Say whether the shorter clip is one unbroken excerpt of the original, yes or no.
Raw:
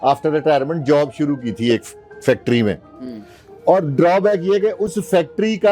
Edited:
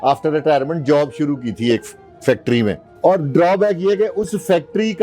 no